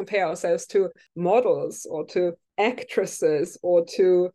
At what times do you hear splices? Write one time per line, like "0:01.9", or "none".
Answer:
0:01.0
0:02.4